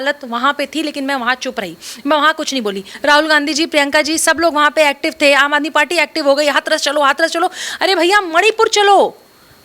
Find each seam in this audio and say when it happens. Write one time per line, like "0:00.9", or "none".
0:02.9

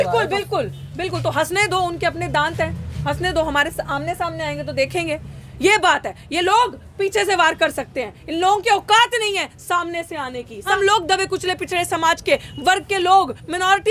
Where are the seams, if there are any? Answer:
0:10.7

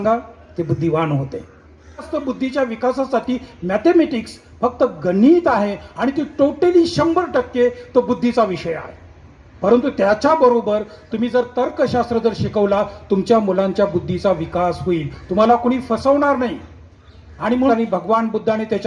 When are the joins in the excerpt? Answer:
0:02.1
0:17.7

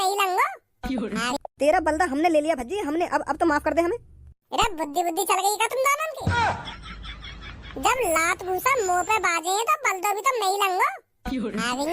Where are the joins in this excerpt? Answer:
0:01.3

